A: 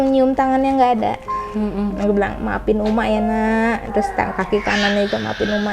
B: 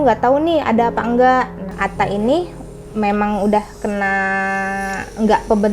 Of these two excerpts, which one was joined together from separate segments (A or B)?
B